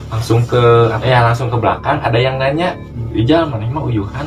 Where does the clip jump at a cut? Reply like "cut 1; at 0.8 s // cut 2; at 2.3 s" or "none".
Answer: cut 1; at 1.0 s // cut 2; at 2.9 s